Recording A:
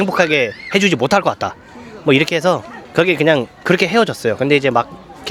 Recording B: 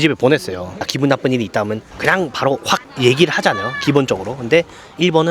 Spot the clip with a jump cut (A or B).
B